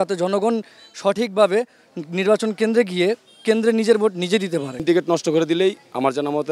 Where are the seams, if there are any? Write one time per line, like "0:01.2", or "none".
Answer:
0:04.8